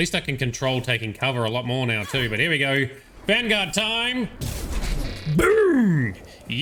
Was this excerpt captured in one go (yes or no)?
yes